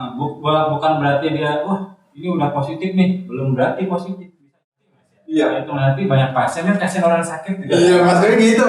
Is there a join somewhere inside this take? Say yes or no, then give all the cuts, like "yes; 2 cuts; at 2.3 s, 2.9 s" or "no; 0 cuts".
yes; 1 cut; at 4.5 s